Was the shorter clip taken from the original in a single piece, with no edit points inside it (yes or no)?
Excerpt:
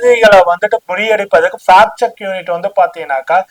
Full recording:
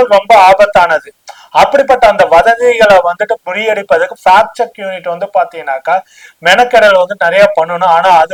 yes